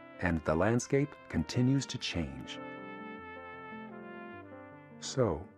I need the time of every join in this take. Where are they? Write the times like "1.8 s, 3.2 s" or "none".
none